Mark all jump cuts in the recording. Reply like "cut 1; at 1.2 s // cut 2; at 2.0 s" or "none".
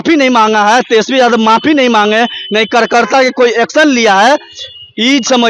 none